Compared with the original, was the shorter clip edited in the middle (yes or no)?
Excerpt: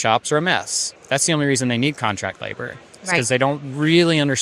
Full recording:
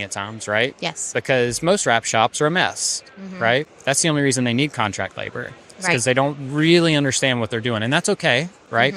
yes